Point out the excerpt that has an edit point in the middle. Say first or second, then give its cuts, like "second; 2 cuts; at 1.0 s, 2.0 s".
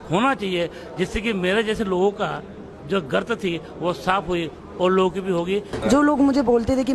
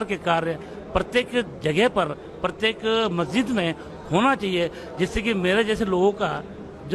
first; 1 cut; at 5.7 s